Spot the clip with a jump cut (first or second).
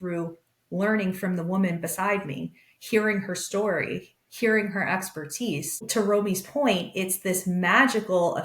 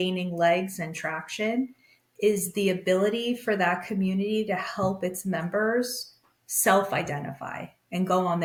first